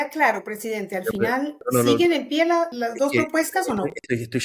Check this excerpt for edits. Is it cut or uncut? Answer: cut